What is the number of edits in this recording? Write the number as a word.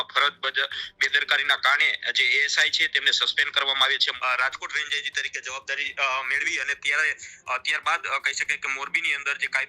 one